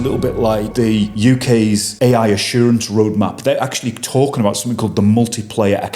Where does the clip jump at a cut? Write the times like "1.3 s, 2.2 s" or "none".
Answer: 1.0 s, 1.9 s